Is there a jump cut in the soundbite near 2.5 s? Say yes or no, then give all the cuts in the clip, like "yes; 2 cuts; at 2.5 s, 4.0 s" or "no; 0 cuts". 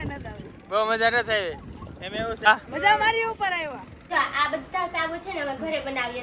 yes; 2 cuts; at 2.5 s, 3.9 s